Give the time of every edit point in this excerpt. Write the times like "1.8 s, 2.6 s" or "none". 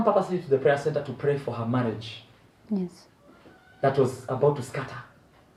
none

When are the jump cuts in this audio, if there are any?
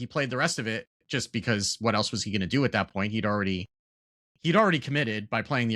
none

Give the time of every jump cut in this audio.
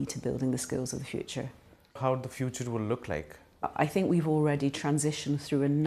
2.0 s, 3.7 s

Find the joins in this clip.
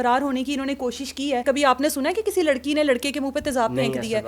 1.4 s

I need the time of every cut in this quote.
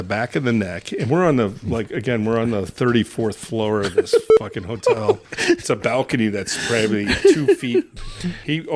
5.6 s, 7.9 s

